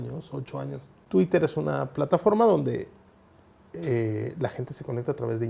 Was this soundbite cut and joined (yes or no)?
yes